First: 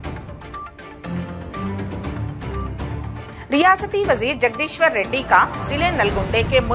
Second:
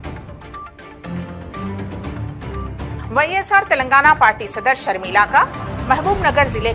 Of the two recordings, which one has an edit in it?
first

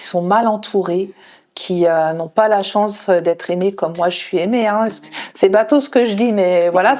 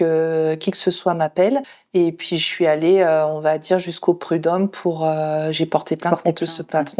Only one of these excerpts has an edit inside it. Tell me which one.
second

